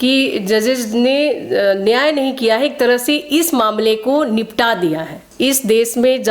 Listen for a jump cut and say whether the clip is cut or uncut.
cut